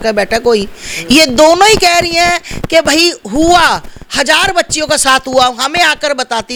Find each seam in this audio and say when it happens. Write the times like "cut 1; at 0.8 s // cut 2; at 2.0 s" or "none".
none